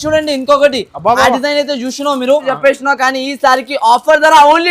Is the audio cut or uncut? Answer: cut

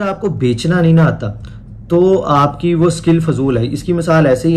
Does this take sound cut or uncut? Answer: uncut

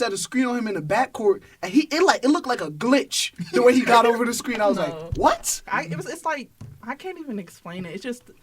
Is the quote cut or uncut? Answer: cut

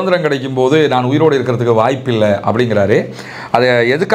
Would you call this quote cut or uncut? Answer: uncut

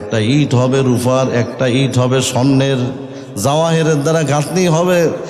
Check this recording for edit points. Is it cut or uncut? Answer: uncut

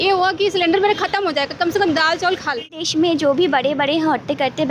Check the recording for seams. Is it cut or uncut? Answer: cut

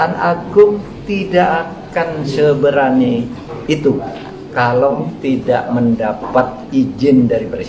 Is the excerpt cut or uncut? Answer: uncut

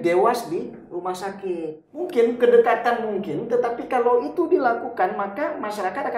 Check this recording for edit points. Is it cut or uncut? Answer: cut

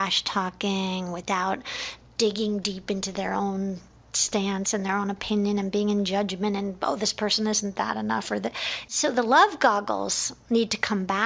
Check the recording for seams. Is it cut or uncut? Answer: cut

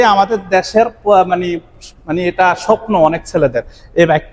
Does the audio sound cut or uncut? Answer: uncut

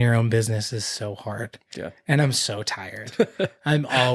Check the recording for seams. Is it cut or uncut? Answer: uncut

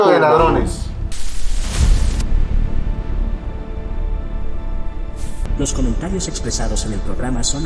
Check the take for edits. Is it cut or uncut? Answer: uncut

